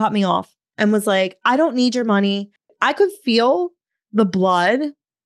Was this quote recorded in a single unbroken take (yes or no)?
no